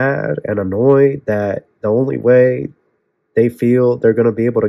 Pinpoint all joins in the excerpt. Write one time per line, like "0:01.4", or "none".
none